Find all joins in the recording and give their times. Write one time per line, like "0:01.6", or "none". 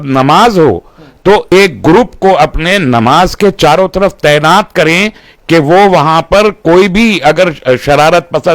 0:01.5